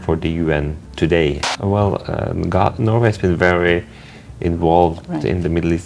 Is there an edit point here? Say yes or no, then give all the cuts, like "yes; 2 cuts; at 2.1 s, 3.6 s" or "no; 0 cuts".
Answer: yes; 1 cut; at 1.5 s